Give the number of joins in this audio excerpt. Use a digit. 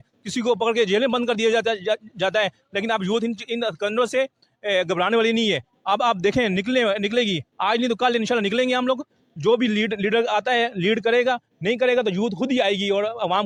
0